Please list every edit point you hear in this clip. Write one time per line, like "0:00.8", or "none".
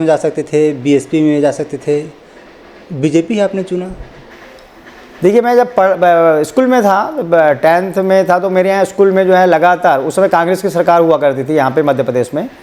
none